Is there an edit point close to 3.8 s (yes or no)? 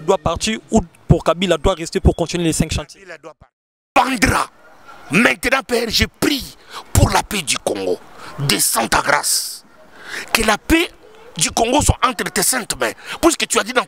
yes